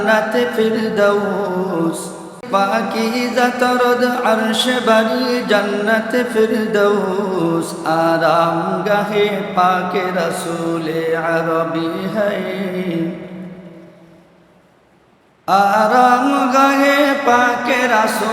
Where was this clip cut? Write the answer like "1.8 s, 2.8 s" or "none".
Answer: 2.4 s